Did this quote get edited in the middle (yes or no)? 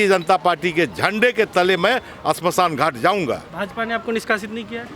no